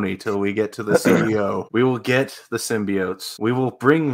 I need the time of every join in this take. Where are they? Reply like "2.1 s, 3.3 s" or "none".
1.6 s, 3.2 s